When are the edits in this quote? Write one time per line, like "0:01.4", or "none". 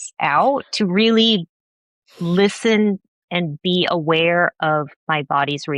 none

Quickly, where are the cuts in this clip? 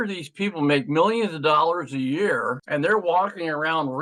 none

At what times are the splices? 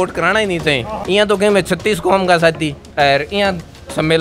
0:00.9
0:02.8

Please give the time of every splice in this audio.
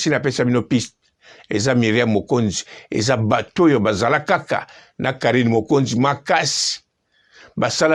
none

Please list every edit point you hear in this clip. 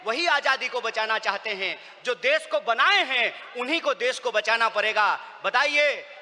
none

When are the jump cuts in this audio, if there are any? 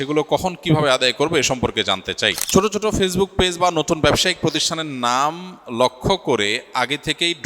0:02.4

